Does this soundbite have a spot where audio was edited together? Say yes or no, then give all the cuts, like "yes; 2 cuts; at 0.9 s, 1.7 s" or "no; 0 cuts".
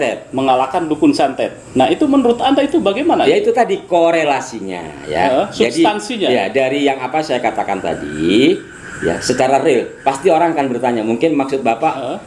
no; 0 cuts